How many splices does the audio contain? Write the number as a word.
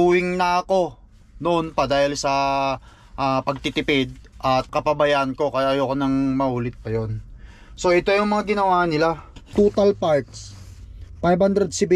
two